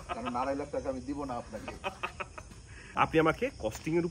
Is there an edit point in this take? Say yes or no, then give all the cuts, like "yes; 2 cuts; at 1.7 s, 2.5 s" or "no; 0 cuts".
yes; 1 cut; at 2.8 s